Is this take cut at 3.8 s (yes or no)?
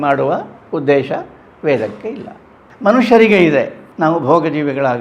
yes